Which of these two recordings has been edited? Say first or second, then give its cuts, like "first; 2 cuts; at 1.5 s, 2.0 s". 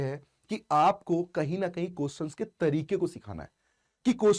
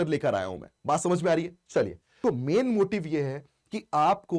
second; 1 cut; at 2.2 s